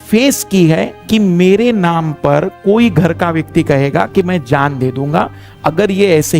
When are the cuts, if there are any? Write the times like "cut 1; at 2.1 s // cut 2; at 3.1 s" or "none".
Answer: cut 1; at 1.0 s